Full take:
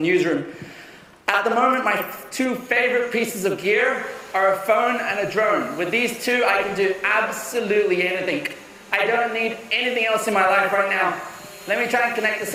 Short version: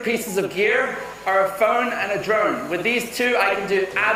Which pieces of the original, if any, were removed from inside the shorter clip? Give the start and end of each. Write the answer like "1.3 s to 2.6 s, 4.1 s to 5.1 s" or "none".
none